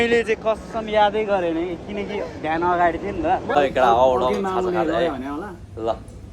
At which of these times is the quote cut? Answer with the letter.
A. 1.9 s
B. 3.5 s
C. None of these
B